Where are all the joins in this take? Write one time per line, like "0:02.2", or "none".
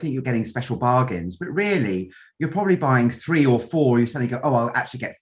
none